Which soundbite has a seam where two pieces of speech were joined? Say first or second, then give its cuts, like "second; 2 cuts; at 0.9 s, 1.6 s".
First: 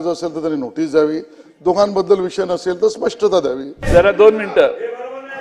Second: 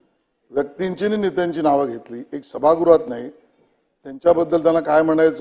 first; 1 cut; at 3.8 s